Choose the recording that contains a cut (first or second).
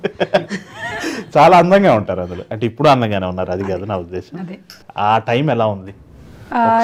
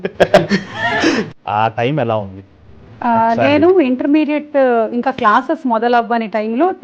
second